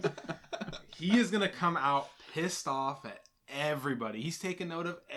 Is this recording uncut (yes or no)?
yes